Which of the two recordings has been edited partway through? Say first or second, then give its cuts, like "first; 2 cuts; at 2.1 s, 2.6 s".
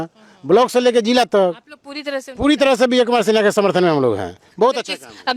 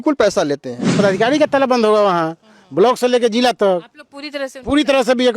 second; 1 cut; at 1.0 s